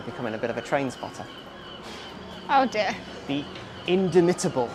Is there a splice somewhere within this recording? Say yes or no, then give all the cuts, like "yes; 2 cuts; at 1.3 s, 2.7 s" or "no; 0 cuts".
no; 0 cuts